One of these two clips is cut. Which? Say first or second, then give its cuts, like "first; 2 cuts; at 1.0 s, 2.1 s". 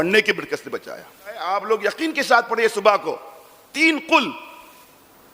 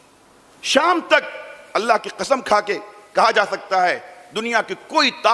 first; 1 cut; at 1.4 s